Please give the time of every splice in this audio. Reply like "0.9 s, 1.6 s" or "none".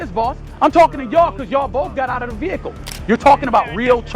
2.9 s